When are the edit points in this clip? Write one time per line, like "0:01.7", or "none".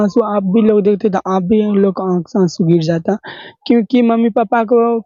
none